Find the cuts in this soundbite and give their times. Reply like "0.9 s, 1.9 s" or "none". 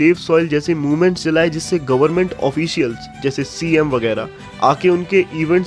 none